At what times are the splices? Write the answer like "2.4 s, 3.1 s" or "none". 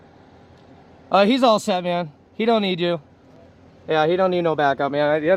none